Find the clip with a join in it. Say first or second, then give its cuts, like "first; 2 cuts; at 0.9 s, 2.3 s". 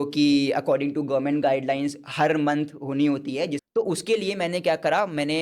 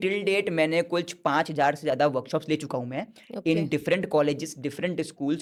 first; 1 cut; at 3.6 s